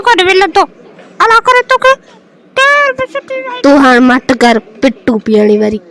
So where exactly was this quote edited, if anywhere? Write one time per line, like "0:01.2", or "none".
0:03.2